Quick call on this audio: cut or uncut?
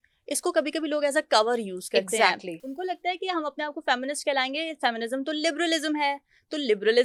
uncut